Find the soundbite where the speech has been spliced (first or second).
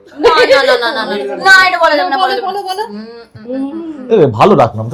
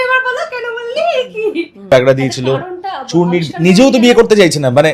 second